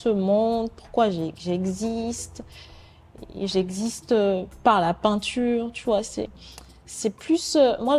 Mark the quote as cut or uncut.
uncut